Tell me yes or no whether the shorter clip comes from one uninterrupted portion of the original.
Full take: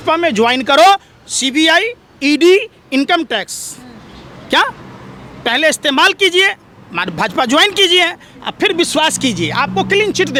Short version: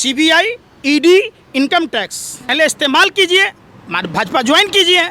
no